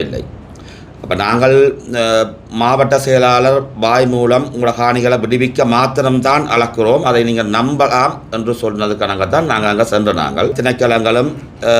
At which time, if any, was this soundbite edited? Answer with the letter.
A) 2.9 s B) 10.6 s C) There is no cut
B